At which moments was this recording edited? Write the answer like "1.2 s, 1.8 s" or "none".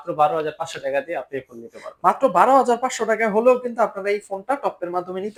none